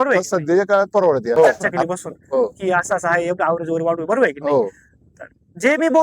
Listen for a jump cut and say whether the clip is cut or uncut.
cut